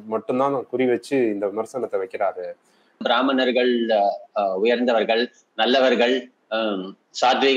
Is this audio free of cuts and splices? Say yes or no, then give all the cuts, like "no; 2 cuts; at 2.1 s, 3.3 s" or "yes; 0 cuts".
no; 1 cut; at 3.0 s